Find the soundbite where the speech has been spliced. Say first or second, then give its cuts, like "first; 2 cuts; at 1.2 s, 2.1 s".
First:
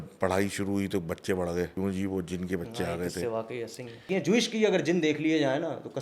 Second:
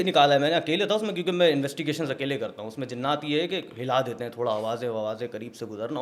first; 2 cuts; at 1.7 s, 4.1 s